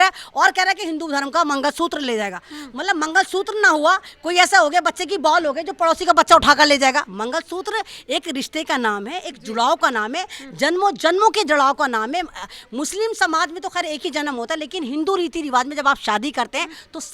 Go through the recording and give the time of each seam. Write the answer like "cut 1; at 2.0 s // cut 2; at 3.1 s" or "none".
none